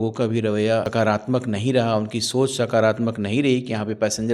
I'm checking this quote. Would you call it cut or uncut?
cut